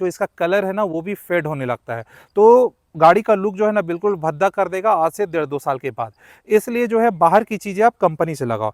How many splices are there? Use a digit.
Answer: 0